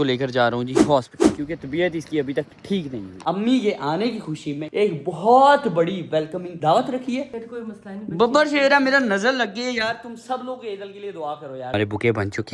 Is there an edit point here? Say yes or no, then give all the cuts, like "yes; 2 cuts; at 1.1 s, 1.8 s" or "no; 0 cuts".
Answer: yes; 3 cuts; at 3.2 s, 7.3 s, 11.7 s